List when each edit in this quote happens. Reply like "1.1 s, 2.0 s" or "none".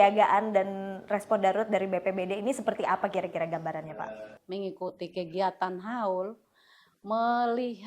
4.4 s